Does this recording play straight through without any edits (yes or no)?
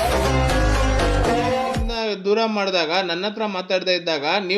no